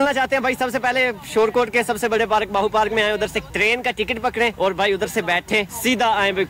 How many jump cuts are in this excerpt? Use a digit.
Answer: 0